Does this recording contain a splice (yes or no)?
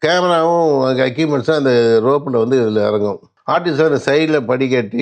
yes